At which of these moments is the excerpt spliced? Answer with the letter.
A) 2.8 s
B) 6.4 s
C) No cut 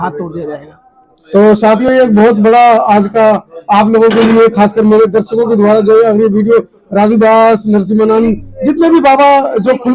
C